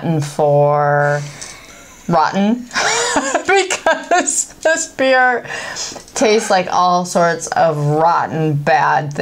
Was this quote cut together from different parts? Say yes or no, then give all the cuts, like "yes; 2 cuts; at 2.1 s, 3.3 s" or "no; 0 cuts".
no; 0 cuts